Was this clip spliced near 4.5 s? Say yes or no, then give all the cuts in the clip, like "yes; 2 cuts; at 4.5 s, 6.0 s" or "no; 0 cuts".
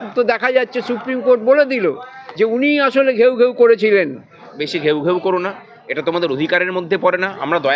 yes; 1 cut; at 4.5 s